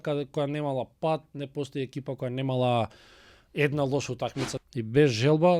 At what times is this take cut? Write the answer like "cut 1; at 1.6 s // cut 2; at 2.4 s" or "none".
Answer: cut 1; at 4.6 s